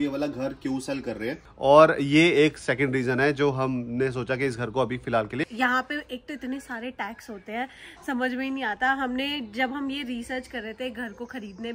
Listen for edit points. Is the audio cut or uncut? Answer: cut